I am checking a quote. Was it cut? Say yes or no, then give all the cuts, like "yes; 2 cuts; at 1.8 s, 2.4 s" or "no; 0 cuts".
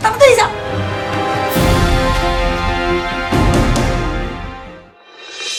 no; 0 cuts